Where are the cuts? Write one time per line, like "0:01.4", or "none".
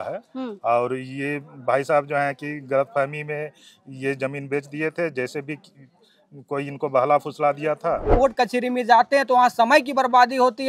0:08.1

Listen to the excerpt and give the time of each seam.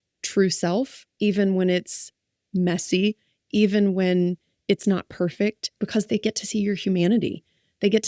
0:05.8

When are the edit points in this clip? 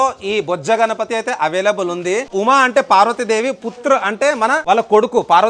0:02.3
0:04.6

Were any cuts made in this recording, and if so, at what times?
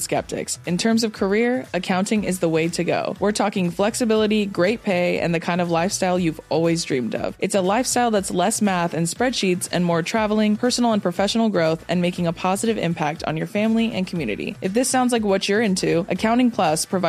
none

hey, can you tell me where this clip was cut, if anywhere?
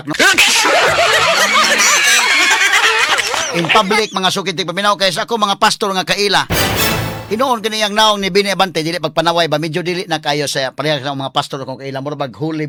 none

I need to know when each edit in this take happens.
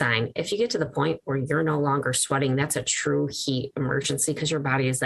none

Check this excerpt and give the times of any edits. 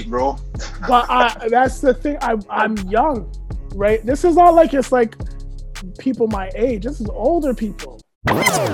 0:02.5

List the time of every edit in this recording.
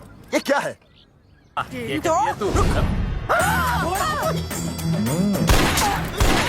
0:01.7

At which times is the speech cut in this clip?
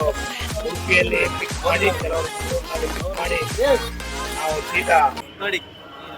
0:05.3

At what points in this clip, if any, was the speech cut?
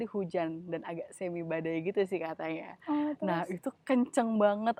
none

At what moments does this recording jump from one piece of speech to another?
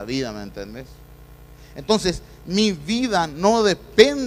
0:01.8

